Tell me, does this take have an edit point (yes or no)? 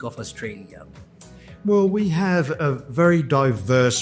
no